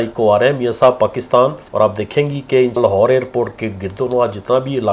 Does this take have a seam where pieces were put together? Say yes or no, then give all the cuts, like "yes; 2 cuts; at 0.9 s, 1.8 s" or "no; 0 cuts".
yes; 2 cuts; at 1.6 s, 2.8 s